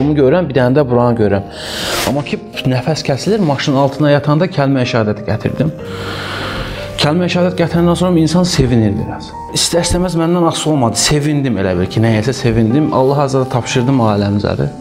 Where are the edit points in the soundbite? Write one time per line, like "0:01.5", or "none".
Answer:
none